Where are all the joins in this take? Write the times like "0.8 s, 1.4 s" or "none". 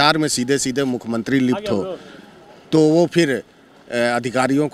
none

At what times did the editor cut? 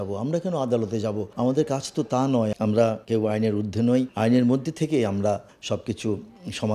1.3 s, 2.8 s, 4.1 s, 5.5 s

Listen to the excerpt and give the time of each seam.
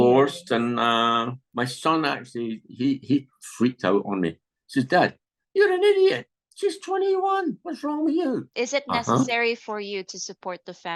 8.5 s

